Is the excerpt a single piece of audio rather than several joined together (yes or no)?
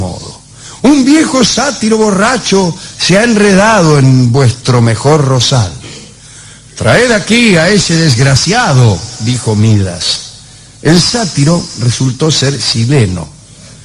no